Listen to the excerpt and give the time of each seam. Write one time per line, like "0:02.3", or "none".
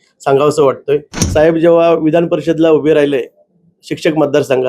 0:01.2